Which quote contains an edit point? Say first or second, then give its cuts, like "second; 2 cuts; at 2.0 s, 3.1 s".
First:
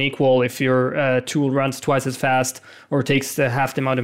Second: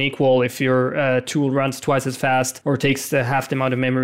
second; 1 cut; at 2.5 s